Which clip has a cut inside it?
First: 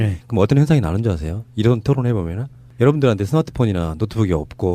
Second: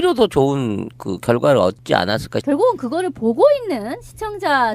second; 1 cut; at 3.4 s

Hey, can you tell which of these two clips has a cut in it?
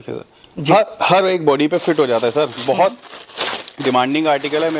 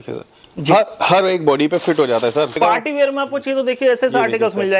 second; 1 cut; at 2.6 s

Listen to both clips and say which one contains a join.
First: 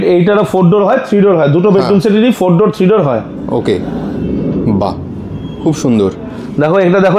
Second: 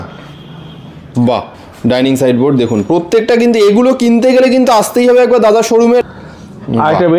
second; 2 cuts; at 1.5 s, 6.0 s

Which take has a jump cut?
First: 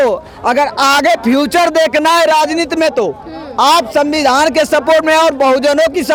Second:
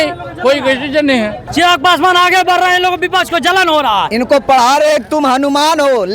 second; 2 cuts; at 1.4 s, 4.1 s

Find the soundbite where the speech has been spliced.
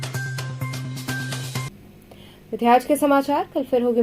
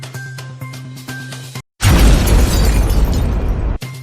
second; 1 cut; at 1.7 s

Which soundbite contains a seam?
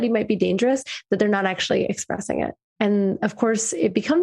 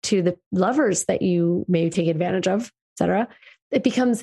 first; 1 cut; at 2.6 s

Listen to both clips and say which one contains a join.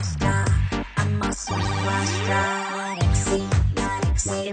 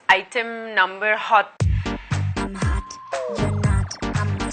second; 1 cut; at 1.6 s

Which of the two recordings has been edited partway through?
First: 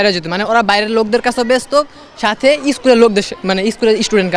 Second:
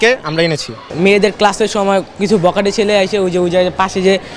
second; 1 cut; at 0.9 s

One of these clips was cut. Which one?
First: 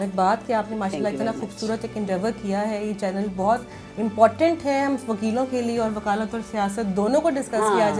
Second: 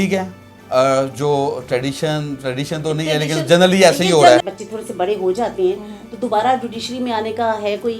second; 1 cut; at 4.4 s

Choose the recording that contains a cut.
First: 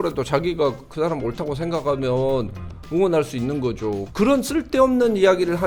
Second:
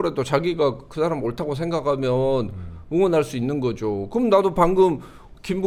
first; 1 cut; at 4.0 s

